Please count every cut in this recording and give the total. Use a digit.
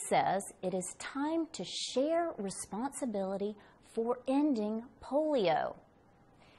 0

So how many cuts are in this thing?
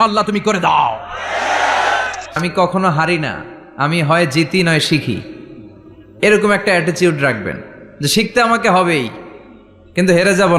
1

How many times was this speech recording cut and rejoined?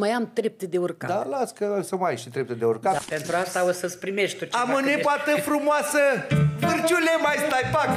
1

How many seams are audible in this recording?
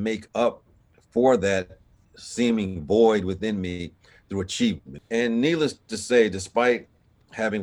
1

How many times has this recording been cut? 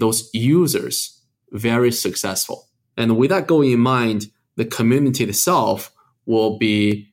1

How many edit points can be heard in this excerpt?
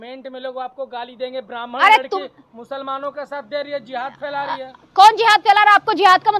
0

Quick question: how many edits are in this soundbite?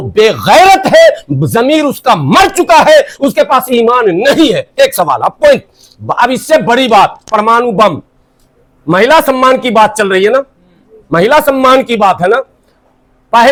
0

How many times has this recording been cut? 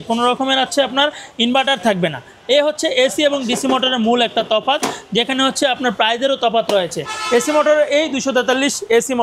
0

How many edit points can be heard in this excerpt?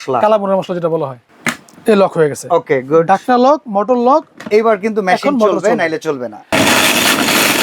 2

